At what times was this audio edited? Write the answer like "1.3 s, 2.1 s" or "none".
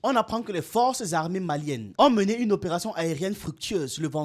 1.8 s